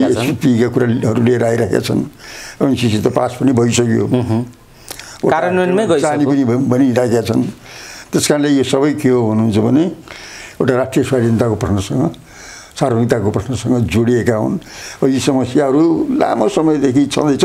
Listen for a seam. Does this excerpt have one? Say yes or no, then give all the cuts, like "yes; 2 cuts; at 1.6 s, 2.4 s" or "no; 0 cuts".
no; 0 cuts